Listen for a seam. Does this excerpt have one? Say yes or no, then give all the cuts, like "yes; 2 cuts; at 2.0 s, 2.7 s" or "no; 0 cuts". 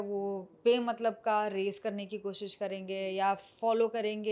no; 0 cuts